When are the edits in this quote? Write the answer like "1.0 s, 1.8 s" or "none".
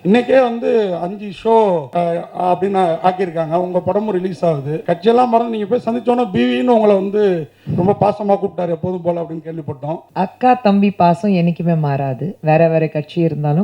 1.9 s, 4.7 s, 10.1 s

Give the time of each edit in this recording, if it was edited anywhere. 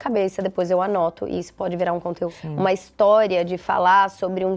2.4 s

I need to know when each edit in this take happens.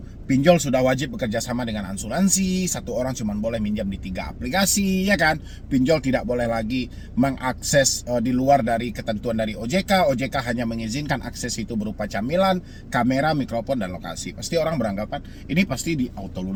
none

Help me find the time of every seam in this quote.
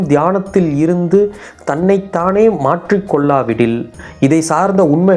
4.0 s

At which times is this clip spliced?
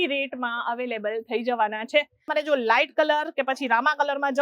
2.3 s

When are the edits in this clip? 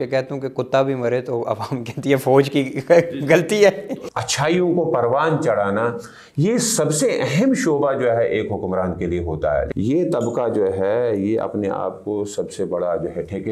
3.9 s, 9.7 s

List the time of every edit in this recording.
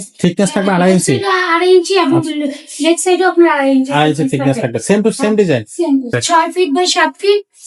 6.1 s

